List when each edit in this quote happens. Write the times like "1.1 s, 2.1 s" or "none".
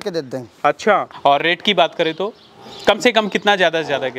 1.1 s